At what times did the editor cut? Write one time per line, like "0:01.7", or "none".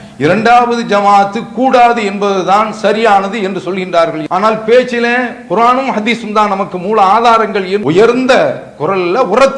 0:04.2
0:07.8

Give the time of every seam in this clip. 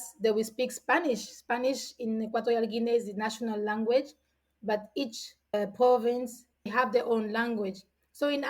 0:06.7

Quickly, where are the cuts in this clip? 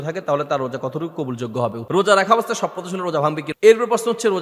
0:01.8
0:03.5

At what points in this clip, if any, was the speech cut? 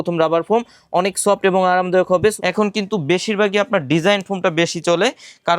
0:02.4

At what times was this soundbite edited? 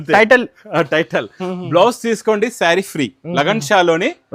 none

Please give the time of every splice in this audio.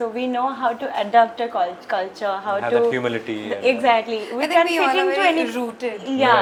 none

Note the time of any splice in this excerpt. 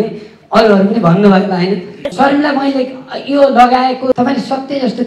0:02.0
0:04.2

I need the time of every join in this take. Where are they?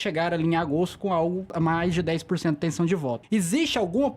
0:01.5
0:03.2

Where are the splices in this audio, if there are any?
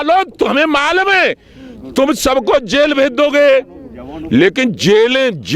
none

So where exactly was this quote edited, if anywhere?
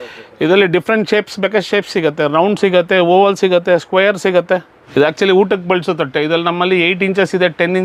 0:04.8

